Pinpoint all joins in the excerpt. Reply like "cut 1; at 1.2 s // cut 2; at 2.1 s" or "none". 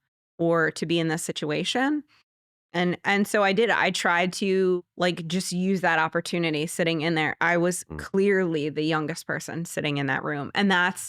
cut 1; at 4.8 s